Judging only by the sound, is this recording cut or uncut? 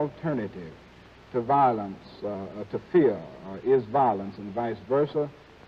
uncut